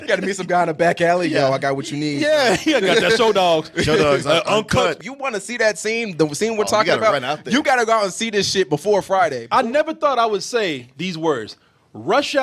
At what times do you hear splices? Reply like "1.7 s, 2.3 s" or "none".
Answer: 9.4 s